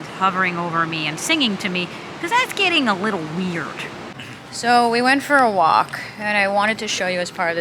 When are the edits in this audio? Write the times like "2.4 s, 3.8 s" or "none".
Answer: 4.1 s